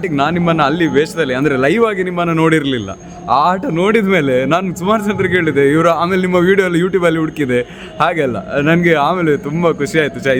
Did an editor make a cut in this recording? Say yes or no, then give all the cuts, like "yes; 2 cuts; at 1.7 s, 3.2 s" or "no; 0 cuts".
no; 0 cuts